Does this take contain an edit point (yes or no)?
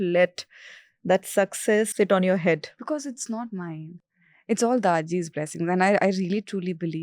yes